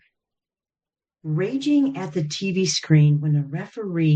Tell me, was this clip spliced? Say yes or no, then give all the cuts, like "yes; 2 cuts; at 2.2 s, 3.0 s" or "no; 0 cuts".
no; 0 cuts